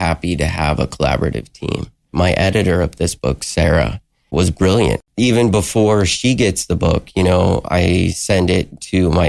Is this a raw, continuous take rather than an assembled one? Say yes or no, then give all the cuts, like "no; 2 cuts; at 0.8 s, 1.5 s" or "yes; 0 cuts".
no; 3 cuts; at 2.1 s, 4.3 s, 5.0 s